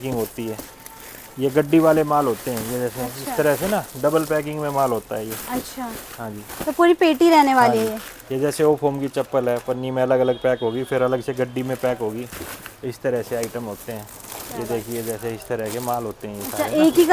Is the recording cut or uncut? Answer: uncut